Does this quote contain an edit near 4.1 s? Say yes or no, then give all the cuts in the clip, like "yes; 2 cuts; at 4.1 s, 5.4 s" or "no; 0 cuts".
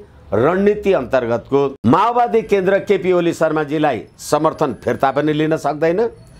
no; 1 cut; at 1.7 s